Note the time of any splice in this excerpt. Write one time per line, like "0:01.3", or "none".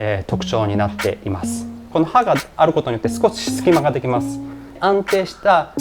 0:01.8
0:04.8